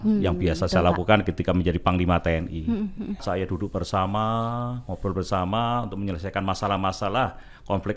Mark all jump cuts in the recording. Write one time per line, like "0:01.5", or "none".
0:03.2